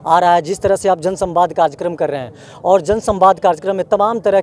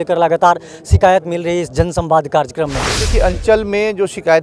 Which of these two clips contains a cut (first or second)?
second